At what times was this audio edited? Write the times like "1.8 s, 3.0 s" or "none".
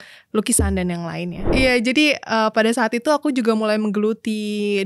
1.5 s